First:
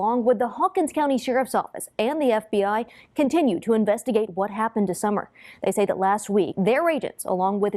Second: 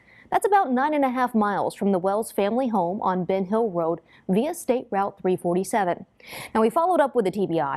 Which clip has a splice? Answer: first; 1 cut; at 6.5 s

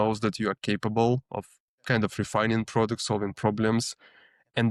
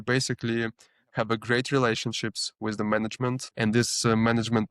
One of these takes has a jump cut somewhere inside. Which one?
second; 1 cut; at 3.5 s

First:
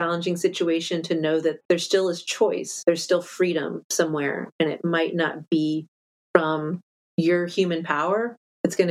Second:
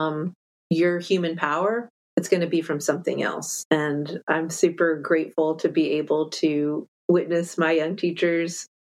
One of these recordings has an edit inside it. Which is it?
first; 2 cuts; at 1.6 s, 2.7 s

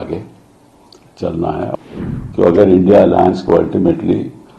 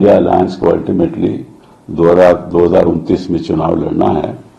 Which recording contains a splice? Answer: first; 1 cut; at 1.7 s

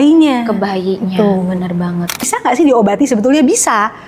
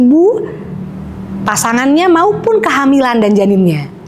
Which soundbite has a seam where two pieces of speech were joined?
first; 1 cut; at 2.2 s

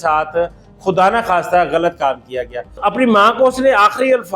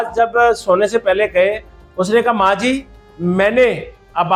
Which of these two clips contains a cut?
first; 1 cut; at 2.7 s

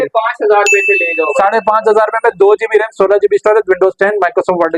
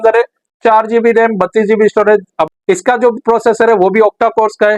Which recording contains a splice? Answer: second; 1 cut; at 2.4 s

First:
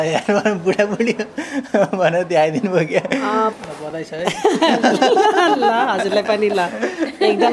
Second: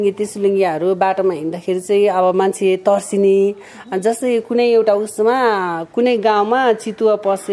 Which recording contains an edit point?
first; 1 cut; at 3.5 s

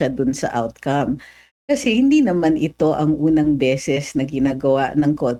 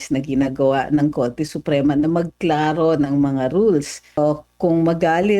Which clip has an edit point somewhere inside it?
second; 1 cut; at 4.2 s

